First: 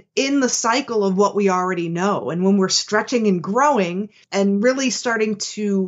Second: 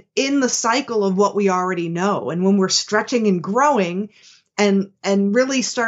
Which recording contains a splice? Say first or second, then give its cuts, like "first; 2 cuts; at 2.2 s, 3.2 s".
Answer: first; 1 cut; at 4.2 s